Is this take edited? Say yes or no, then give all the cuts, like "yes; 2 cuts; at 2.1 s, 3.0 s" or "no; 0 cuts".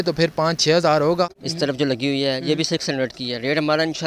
yes; 1 cut; at 1.4 s